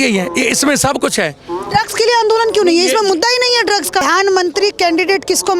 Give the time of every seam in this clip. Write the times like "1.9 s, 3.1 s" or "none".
4.0 s